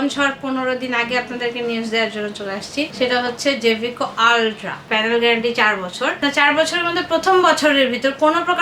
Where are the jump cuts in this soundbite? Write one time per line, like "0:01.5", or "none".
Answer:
0:02.9
0:04.8
0:06.2